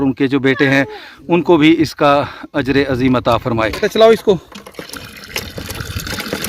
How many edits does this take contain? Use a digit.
1